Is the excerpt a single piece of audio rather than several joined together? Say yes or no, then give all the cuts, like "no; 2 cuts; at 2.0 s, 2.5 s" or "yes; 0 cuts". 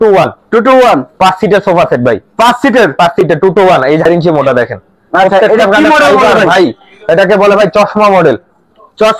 no; 1 cut; at 4.1 s